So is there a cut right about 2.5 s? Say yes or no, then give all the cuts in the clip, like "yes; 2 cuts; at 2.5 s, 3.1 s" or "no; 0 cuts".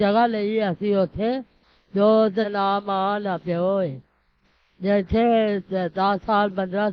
yes; 1 cut; at 2.5 s